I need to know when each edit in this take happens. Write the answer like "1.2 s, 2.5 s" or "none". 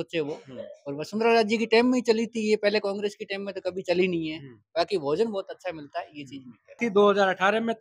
6.8 s